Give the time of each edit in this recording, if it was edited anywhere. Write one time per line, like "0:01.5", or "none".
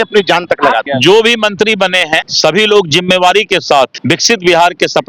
0:00.8
0:02.3
0:04.0